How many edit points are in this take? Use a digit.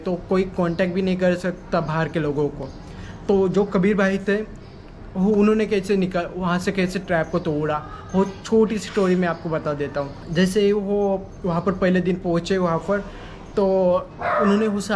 0